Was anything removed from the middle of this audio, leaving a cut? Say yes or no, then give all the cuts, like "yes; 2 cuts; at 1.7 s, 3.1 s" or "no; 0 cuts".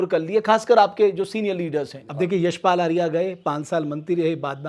yes; 1 cut; at 2.0 s